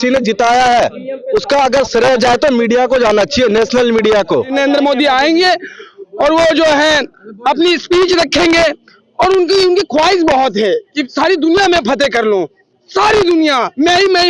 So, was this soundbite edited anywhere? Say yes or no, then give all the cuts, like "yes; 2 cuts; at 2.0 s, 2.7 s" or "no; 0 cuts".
yes; 1 cut; at 4.5 s